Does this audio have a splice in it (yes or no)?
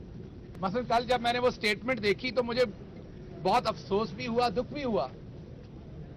no